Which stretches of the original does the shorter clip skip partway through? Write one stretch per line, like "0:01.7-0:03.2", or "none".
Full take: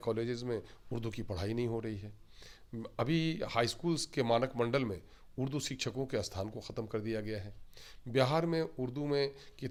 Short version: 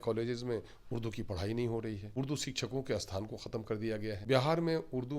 0:02.0-0:05.3
0:07.4-0:08.1